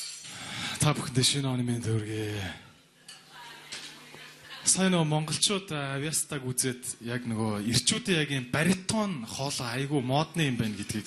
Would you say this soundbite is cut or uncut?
cut